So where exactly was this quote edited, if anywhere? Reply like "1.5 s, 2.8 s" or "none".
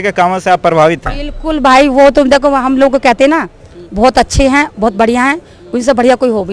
none